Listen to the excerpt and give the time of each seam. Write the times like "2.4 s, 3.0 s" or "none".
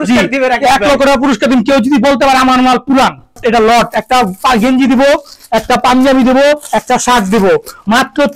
3.4 s